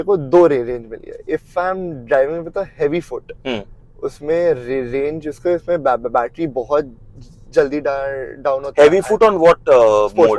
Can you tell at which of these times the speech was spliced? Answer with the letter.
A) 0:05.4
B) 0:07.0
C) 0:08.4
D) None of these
D